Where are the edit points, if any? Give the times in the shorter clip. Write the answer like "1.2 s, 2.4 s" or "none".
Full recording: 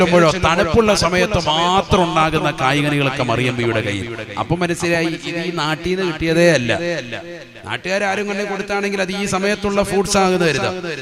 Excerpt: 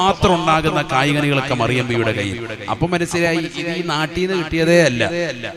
none